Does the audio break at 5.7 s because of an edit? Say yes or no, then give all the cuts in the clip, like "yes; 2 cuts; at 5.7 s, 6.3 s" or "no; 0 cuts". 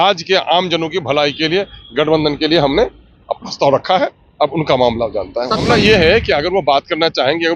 yes; 1 cut; at 5.7 s